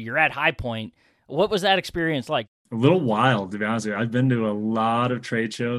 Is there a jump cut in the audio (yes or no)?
yes